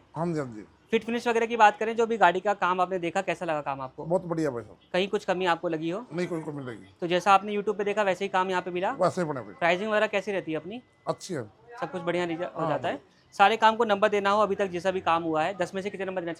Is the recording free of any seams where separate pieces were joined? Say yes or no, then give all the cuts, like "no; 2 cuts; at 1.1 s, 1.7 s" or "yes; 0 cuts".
yes; 0 cuts